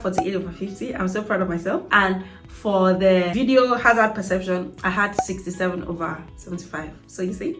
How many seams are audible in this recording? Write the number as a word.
two